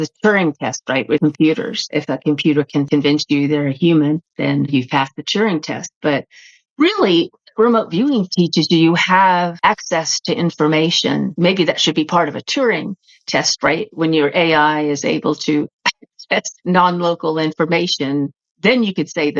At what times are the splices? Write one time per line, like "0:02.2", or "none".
0:01.2
0:01.8
0:02.9
0:09.5
0:11.3